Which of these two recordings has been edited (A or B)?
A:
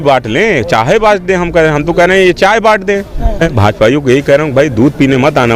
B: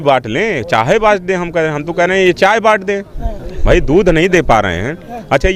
A